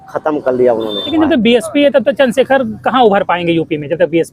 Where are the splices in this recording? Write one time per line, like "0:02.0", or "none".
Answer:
0:01.1